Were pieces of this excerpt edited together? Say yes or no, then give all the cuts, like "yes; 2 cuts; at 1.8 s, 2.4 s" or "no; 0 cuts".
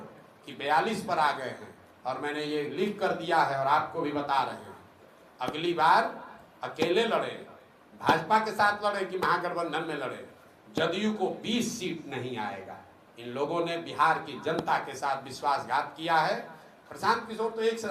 no; 0 cuts